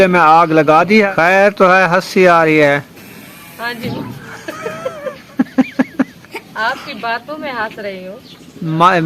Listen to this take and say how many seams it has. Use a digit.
2